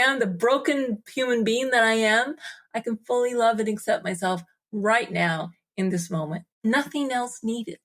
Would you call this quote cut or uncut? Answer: cut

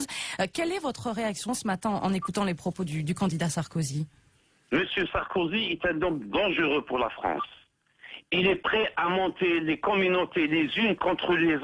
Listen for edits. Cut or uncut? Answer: cut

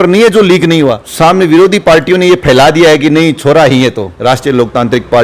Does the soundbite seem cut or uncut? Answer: cut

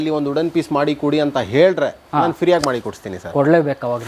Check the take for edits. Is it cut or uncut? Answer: uncut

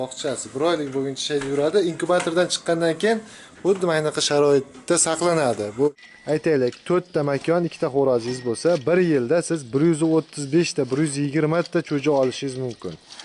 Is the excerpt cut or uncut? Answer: cut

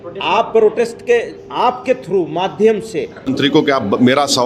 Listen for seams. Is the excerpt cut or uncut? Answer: cut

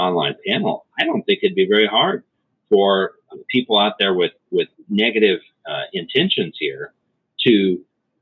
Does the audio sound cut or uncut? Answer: cut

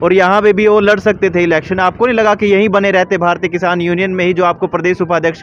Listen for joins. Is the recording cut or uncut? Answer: uncut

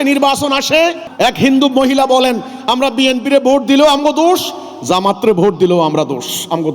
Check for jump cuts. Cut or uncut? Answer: cut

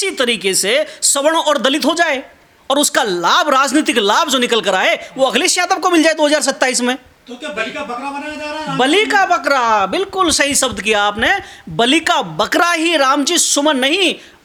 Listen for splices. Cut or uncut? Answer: uncut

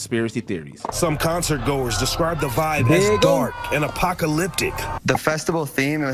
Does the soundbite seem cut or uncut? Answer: uncut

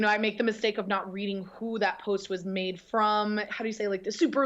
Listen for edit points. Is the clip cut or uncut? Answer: cut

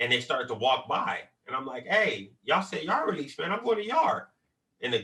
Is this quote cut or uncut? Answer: uncut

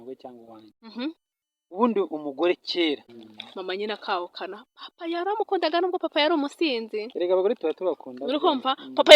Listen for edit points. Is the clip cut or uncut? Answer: cut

